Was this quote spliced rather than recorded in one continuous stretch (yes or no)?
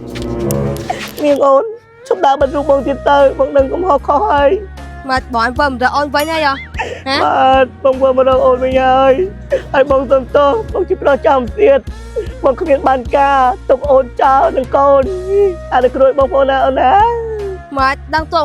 yes